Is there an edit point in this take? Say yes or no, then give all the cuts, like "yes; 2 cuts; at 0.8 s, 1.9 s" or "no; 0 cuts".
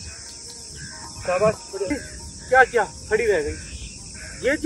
yes; 1 cut; at 1.9 s